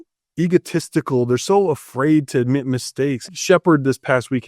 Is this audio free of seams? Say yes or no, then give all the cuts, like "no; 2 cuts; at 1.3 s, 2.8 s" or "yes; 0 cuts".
no; 1 cut; at 3.2 s